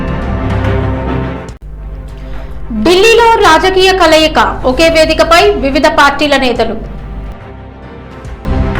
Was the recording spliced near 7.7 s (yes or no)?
no